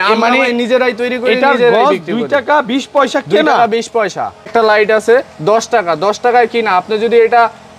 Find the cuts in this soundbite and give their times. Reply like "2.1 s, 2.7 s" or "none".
4.5 s